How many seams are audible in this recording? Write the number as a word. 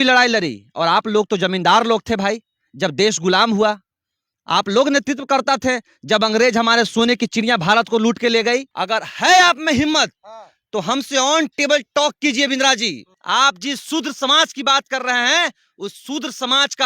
two